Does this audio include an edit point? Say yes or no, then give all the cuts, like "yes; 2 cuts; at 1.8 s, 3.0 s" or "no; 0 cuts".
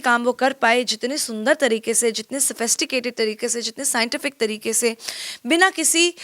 no; 0 cuts